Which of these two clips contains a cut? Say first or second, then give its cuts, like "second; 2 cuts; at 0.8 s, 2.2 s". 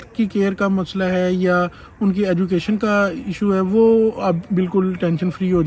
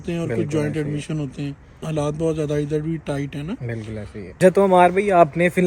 second; 2 cuts; at 1.7 s, 4.3 s